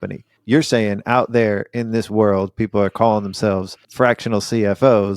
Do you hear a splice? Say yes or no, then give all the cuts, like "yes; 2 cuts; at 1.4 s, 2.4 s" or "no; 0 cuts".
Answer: yes; 1 cut; at 3.8 s